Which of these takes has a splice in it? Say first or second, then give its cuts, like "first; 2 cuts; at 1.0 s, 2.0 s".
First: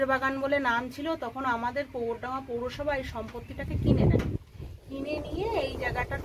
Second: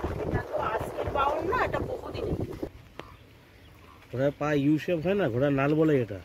second; 1 cut; at 2.7 s